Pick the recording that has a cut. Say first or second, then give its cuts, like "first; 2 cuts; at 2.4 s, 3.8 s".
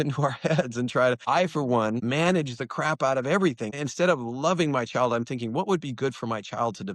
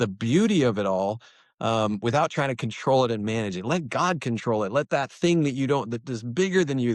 first; 3 cuts; at 1.2 s, 2.0 s, 3.7 s